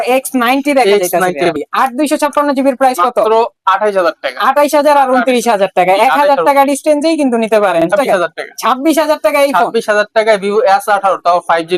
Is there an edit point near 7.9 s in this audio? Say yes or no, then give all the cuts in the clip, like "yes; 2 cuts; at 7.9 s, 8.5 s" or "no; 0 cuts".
yes; 2 cuts; at 1.5 s, 7.9 s